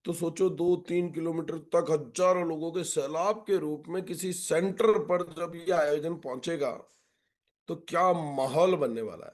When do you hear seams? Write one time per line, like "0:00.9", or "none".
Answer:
none